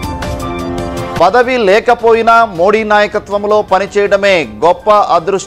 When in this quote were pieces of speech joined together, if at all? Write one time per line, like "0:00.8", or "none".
0:01.2